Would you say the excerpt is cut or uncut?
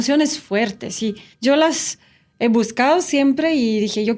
cut